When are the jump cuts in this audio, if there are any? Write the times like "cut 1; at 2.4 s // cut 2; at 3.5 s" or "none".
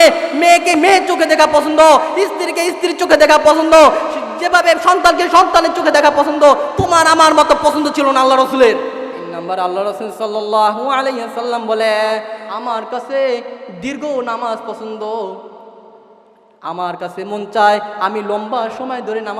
cut 1; at 9.3 s // cut 2; at 12.4 s